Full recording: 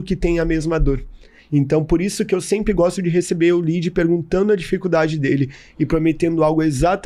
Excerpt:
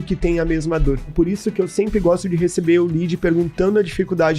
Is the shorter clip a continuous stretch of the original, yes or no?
no